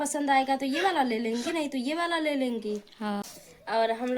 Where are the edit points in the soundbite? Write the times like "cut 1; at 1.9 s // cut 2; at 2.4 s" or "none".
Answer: cut 1; at 3.2 s

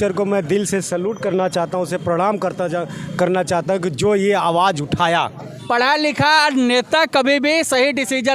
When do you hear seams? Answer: cut 1; at 5.6 s

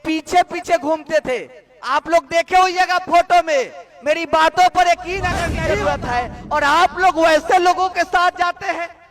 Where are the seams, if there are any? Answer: cut 1; at 5.6 s

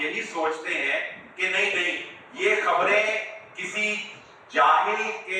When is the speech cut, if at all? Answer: none

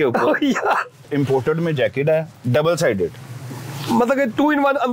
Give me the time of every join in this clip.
cut 1; at 1.1 s

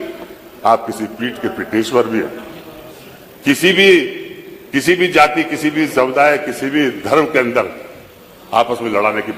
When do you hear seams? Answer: none

